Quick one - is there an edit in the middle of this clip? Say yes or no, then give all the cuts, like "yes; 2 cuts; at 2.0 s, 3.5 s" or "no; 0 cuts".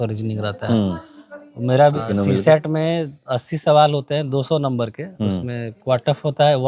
yes; 1 cut; at 2.0 s